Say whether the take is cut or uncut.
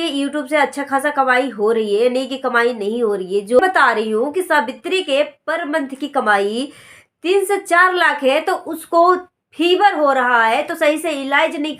cut